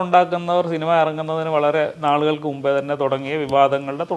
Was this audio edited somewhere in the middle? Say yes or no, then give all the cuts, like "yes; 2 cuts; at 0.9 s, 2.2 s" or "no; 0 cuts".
no; 0 cuts